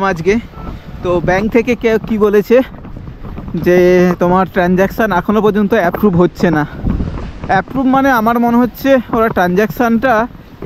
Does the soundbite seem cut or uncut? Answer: uncut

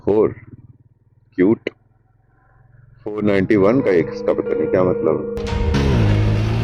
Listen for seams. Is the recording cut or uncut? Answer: cut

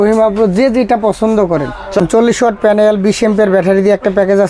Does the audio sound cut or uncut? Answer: cut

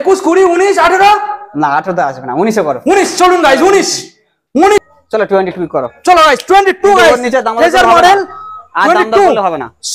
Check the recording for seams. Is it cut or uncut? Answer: cut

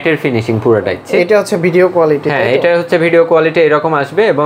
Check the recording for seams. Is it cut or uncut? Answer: cut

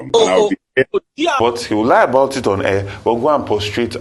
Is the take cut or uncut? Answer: cut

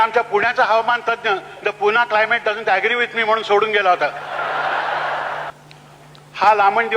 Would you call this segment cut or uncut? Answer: cut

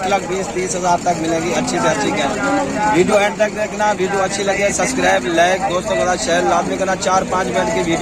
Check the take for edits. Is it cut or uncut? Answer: uncut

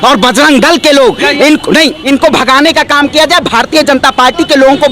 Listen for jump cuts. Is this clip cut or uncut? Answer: cut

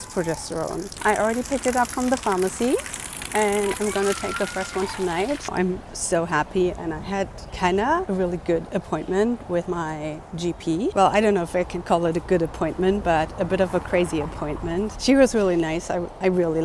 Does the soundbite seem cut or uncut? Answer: uncut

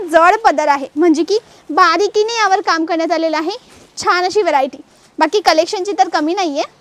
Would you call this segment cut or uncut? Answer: uncut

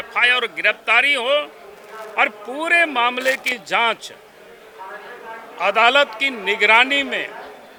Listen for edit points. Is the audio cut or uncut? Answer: uncut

